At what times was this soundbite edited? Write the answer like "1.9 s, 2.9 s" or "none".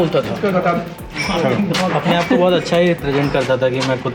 none